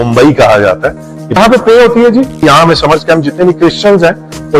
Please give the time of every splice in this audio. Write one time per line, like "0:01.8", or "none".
none